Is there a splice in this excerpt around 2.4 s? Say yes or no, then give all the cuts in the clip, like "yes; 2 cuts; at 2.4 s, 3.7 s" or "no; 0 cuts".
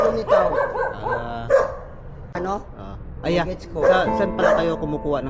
yes; 1 cut; at 2.4 s